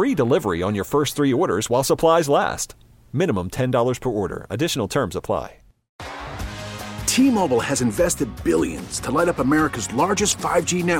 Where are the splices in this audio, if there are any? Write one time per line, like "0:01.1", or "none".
0:06.0